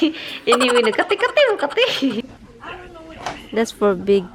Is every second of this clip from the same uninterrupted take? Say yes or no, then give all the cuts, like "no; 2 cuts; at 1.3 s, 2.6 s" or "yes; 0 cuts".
no; 1 cut; at 2.2 s